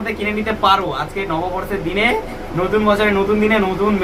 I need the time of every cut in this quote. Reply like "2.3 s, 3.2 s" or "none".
none